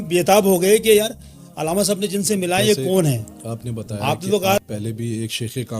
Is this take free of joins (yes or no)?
no